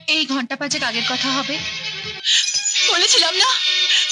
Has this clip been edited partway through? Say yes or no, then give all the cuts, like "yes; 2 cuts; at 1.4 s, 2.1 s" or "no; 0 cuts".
yes; 1 cut; at 2.2 s